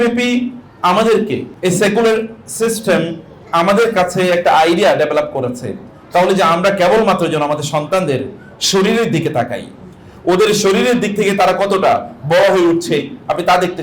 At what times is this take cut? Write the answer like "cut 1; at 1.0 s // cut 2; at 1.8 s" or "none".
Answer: cut 1; at 1.5 s